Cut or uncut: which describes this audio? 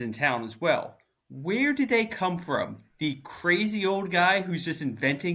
uncut